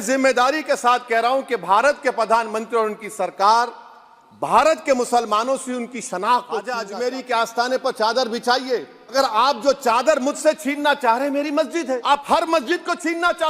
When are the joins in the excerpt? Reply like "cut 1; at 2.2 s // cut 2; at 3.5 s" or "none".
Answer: cut 1; at 6.8 s // cut 2; at 9.1 s // cut 3; at 12.0 s